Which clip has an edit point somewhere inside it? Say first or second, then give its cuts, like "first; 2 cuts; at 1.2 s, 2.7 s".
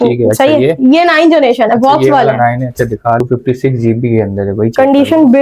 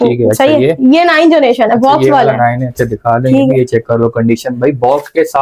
first; 1 cut; at 3.2 s